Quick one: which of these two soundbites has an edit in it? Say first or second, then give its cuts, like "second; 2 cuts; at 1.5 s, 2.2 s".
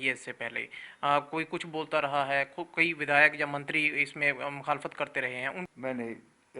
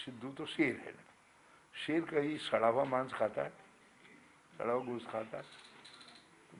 first; 1 cut; at 5.7 s